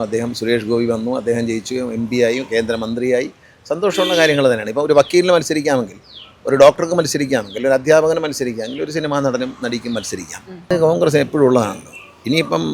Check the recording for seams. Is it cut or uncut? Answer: cut